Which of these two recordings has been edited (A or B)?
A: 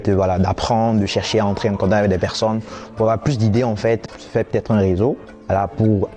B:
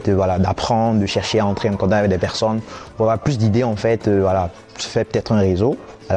A